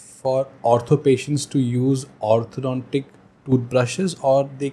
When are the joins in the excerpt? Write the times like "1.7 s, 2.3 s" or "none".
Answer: none